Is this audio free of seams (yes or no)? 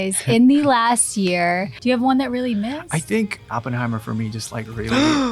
no